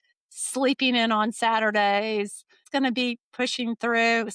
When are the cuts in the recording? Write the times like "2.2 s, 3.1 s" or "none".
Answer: 2.6 s